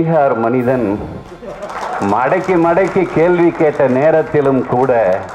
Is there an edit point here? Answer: no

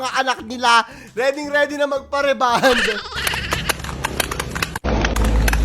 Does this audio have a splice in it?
yes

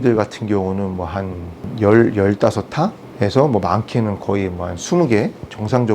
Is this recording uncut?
no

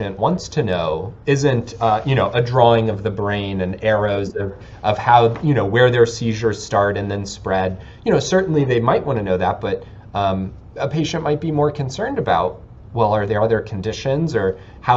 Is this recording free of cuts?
yes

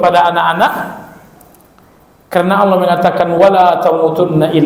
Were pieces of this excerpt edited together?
no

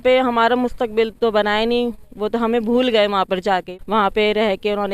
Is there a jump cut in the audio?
yes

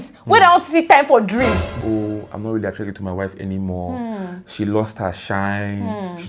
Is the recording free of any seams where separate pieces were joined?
no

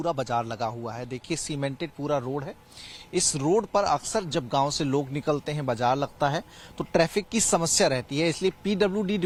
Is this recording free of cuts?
yes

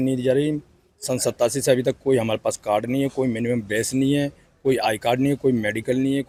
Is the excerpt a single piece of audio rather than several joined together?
yes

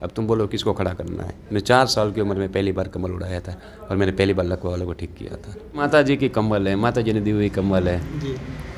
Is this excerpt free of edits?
no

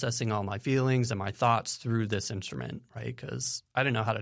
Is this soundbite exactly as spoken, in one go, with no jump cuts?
yes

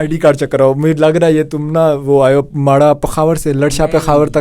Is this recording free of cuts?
yes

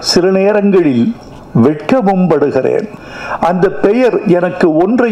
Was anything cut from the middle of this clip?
no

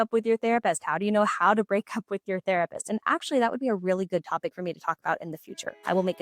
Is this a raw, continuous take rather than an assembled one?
yes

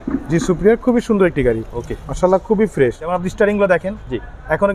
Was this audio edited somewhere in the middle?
yes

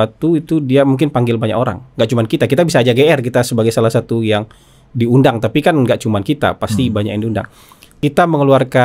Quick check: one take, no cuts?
no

